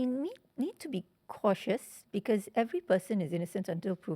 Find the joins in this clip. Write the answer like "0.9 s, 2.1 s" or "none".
none

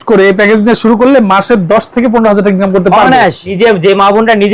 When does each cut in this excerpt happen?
3.4 s

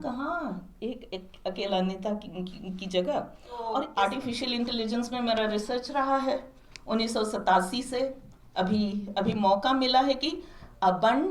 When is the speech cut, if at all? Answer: 3.9 s

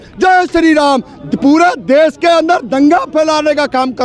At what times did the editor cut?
none

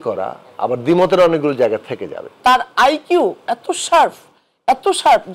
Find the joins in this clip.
2.3 s

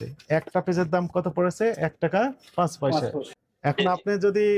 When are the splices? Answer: 3.4 s

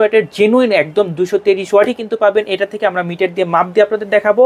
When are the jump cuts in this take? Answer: none

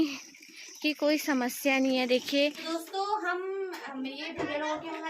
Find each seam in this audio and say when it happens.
2.6 s

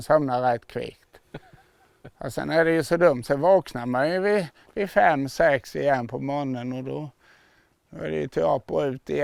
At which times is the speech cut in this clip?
none

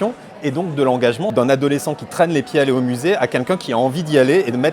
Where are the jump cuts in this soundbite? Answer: 1.3 s

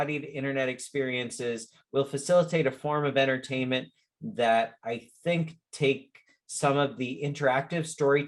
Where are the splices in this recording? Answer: none

